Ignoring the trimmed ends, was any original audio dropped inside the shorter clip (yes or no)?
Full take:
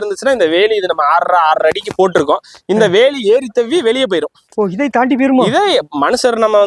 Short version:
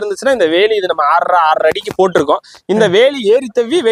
no